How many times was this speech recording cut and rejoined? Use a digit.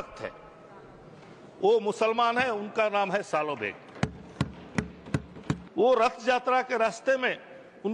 1